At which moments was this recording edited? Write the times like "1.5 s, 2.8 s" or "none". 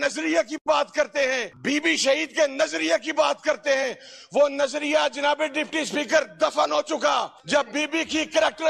1.5 s, 7.4 s